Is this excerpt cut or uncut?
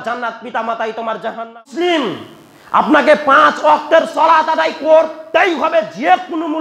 cut